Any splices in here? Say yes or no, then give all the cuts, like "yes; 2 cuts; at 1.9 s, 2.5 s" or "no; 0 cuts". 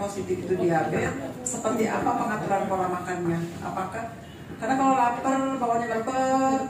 no; 0 cuts